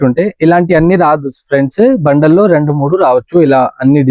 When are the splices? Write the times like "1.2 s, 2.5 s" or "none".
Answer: none